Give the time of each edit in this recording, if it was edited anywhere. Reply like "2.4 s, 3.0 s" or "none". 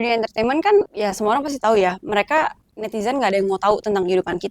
0.9 s